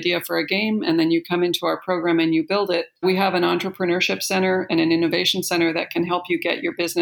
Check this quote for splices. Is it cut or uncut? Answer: cut